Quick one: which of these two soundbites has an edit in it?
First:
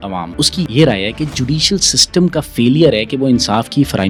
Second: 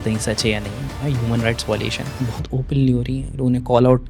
second; 1 cut; at 2.4 s

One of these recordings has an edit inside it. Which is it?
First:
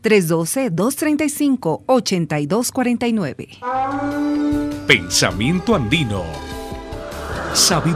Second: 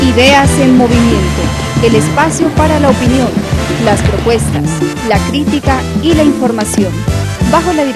first; 1 cut; at 3.7 s

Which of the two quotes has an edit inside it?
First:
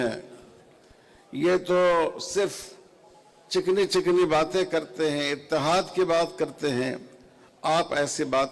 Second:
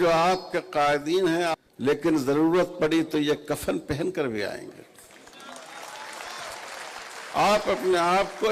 second; 1 cut; at 1.5 s

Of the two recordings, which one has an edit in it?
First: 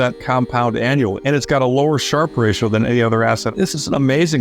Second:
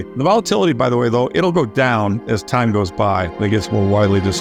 first; 2 cuts; at 1.2 s, 3.5 s

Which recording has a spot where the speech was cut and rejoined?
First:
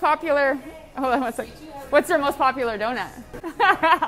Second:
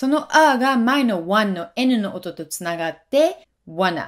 first; 1 cut; at 3.1 s

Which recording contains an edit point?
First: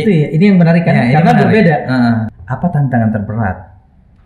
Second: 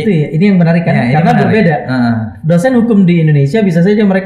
first; 1 cut; at 2.3 s

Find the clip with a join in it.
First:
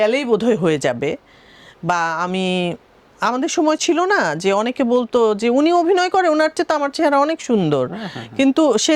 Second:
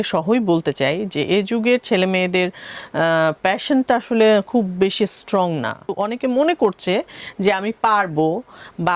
second; 1 cut; at 5.9 s

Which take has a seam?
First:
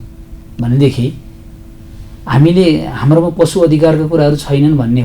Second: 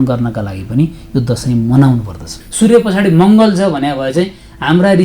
second; 1 cut; at 2.4 s

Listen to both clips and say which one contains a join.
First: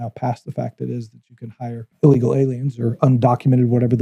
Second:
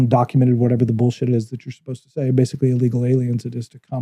first; 1 cut; at 2.0 s

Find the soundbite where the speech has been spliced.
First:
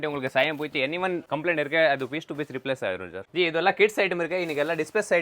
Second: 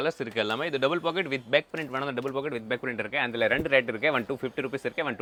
first; 2 cuts; at 1.2 s, 3.2 s

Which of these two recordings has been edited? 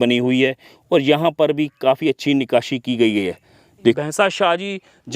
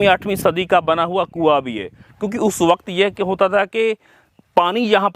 first; 1 cut; at 4.0 s

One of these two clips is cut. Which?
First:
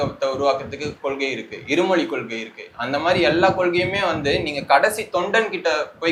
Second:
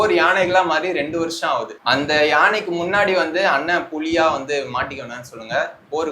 second; 1 cut; at 1.7 s

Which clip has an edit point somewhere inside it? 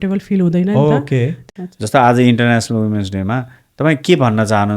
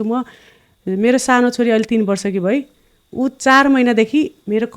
first; 1 cut; at 1.4 s

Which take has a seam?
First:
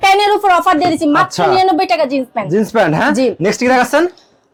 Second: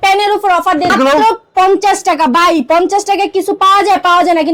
second; 1 cut; at 0.9 s

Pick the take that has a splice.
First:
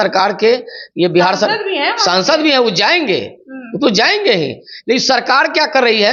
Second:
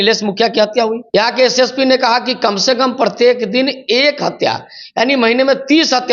second; 1 cut; at 1.0 s

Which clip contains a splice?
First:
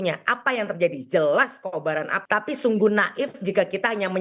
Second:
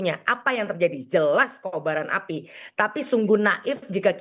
first; 1 cut; at 2.1 s

